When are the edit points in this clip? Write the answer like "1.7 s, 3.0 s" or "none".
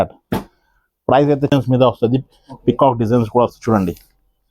1.5 s